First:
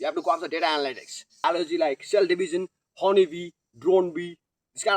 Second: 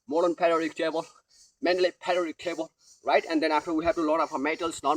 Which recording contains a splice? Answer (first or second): first